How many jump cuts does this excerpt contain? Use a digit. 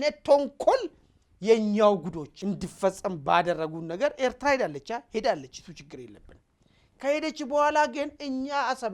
1